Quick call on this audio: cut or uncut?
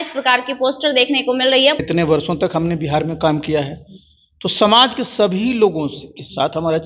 cut